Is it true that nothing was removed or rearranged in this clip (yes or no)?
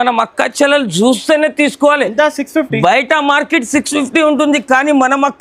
yes